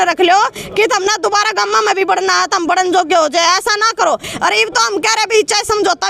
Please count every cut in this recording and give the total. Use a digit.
0